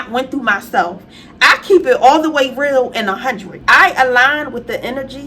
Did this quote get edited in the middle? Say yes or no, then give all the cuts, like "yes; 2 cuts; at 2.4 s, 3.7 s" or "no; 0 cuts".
yes; 1 cut; at 3.5 s